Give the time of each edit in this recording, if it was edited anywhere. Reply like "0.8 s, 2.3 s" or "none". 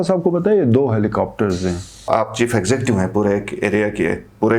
2.0 s